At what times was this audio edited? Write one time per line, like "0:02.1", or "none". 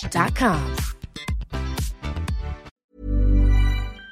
0:02.7